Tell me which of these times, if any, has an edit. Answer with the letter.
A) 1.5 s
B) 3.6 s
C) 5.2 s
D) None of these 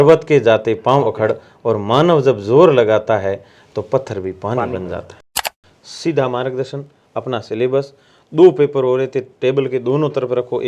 C